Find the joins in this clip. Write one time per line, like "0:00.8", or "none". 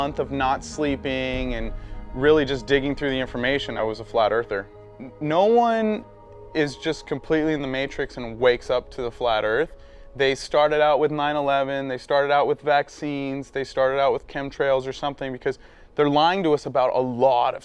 0:02.8

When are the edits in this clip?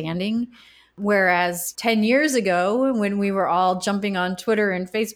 0:00.9
0:01.7

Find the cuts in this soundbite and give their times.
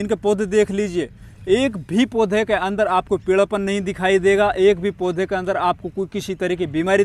none

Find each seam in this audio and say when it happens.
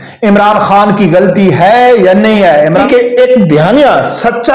0:02.8

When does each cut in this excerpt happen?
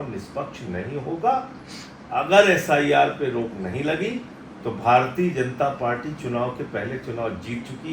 none

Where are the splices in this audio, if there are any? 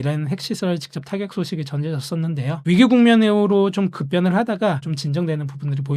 0:04.9

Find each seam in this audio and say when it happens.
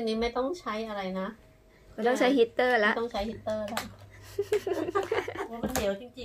none

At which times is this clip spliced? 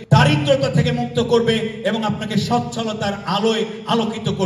none

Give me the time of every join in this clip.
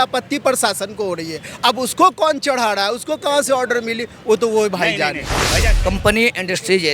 0:05.7

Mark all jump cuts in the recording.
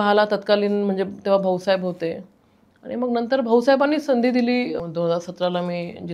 0:04.8

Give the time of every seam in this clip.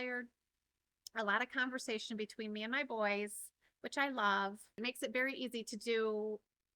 0:04.8

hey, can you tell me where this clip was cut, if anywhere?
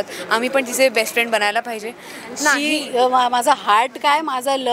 0:02.7

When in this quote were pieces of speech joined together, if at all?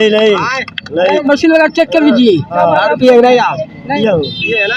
0:01.2
0:02.5
0:04.0

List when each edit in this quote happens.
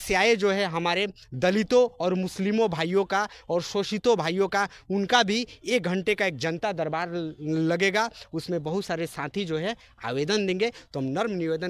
none

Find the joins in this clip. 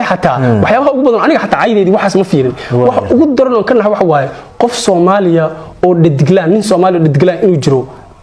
none

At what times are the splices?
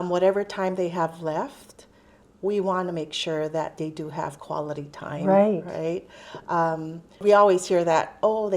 0:07.2

